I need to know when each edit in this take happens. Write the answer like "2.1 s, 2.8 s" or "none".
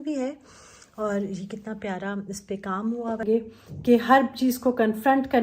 3.2 s